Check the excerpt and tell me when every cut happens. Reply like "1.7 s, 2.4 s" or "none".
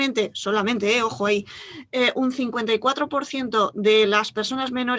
none